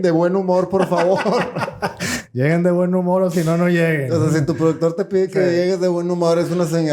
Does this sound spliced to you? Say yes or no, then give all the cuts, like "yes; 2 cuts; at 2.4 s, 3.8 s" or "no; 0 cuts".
no; 0 cuts